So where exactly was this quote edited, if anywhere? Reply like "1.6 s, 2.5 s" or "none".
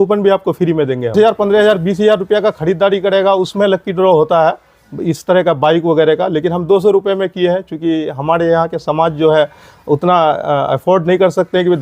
1.1 s